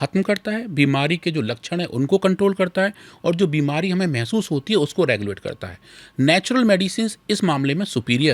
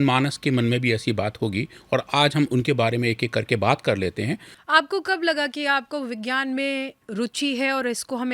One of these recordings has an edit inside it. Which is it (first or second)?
second